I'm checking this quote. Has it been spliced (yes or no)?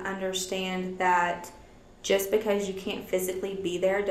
no